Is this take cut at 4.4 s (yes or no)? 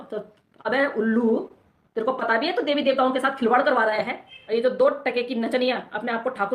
yes